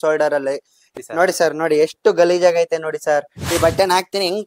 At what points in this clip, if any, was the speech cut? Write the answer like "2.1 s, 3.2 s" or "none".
3.3 s